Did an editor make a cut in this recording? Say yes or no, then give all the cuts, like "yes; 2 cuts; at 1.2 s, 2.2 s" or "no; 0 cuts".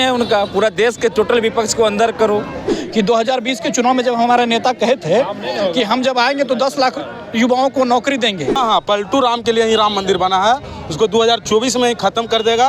yes; 2 cuts; at 2.6 s, 8.6 s